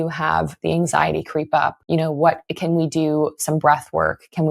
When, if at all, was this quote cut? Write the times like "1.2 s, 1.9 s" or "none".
1.8 s

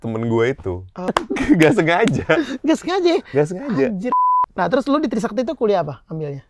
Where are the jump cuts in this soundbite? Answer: 1.1 s, 4.4 s

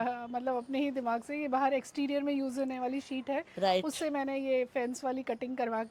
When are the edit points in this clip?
none

